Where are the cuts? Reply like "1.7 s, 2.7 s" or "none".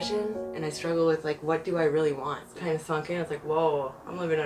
2.5 s